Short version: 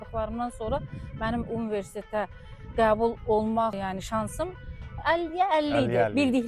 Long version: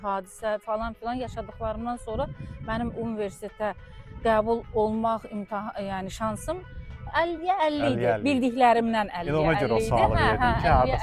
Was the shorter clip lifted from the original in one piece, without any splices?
no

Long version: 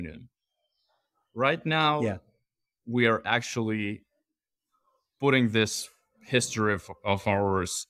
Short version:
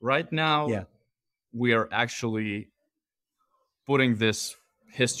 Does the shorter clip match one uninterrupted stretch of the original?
yes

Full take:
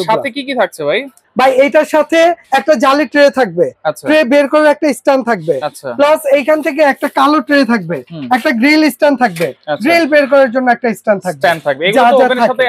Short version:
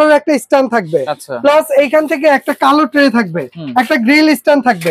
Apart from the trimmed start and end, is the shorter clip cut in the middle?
no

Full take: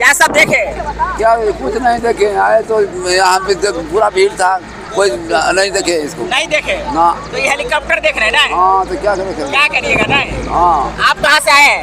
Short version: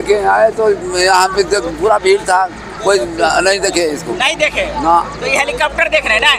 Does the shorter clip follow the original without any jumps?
yes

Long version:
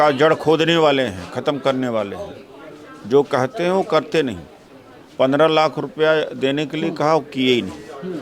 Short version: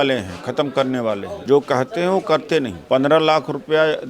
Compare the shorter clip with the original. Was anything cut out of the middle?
yes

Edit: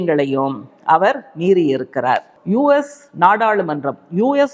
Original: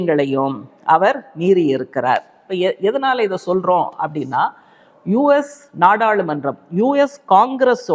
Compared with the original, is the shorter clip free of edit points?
no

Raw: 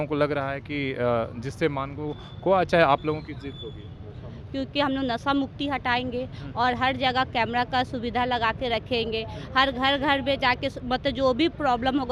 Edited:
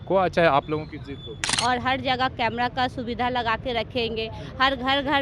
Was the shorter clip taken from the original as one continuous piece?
no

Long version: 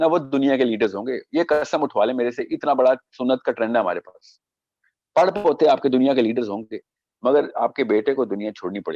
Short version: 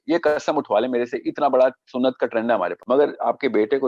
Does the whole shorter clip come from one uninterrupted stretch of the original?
no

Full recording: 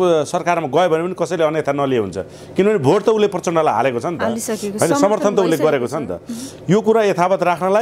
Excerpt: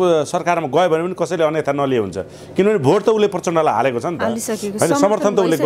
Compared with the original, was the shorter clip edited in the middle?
no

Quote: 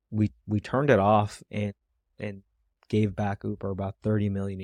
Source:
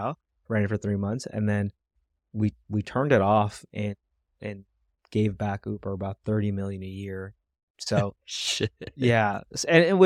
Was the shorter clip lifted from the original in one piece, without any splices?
yes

